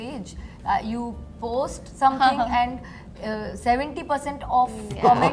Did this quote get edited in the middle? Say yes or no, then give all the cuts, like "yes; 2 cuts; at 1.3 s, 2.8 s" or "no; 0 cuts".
no; 0 cuts